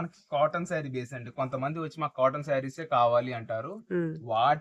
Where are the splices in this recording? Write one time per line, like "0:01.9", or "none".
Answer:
none